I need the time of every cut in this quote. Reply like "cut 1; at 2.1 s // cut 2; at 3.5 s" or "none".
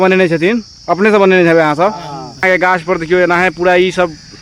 cut 1; at 2.4 s